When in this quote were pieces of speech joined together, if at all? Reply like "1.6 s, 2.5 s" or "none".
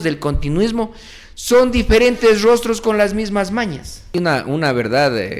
4.2 s